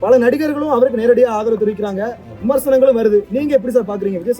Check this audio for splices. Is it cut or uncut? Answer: uncut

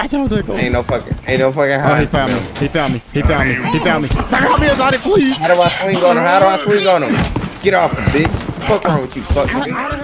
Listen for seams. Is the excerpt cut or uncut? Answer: uncut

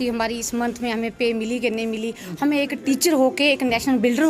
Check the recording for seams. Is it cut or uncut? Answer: uncut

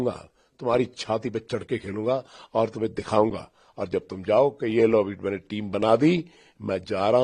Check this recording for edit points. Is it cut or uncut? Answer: uncut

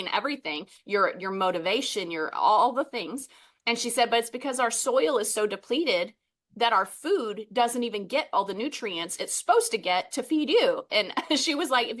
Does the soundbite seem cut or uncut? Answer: uncut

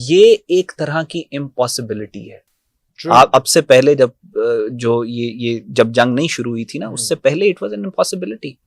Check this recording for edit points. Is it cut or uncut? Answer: uncut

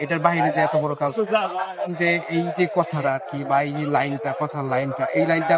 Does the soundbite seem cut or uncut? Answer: cut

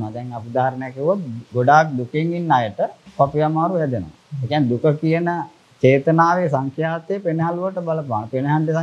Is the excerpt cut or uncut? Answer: cut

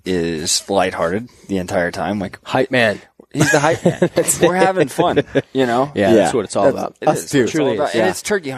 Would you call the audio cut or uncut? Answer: uncut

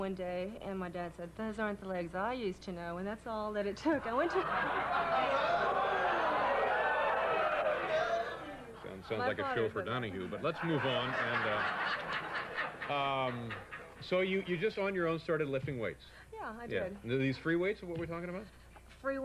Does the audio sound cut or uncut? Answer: uncut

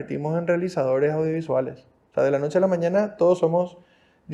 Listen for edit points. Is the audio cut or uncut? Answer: uncut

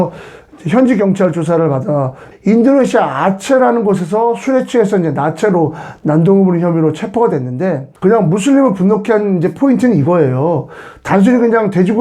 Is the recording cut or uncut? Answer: cut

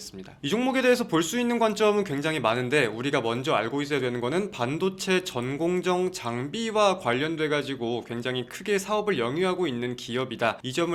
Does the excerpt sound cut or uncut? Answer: uncut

